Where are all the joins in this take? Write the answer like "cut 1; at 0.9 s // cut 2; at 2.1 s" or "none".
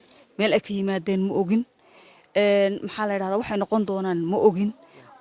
none